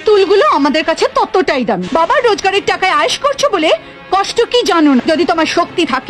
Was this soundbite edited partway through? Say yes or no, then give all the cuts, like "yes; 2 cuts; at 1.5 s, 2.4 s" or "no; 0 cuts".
yes; 2 cuts; at 1.8 s, 5.0 s